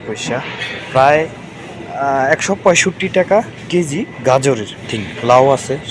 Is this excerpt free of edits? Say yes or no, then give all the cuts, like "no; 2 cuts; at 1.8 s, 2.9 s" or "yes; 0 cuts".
no; 1 cut; at 5.0 s